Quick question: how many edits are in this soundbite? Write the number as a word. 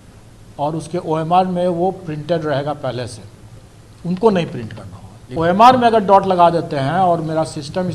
one